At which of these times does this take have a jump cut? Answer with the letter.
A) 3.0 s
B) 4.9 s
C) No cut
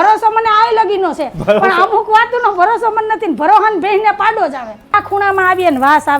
B